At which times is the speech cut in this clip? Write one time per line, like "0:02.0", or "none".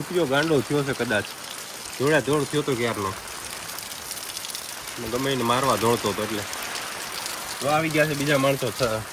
none